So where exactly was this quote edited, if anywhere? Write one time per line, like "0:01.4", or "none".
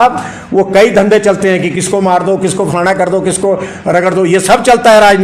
none